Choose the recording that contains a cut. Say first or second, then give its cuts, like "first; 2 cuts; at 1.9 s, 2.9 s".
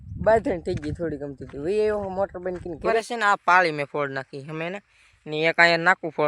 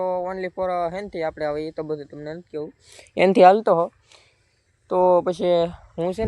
first; 1 cut; at 3.0 s